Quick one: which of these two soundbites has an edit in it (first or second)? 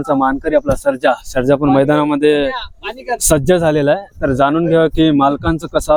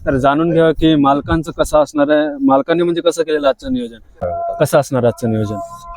second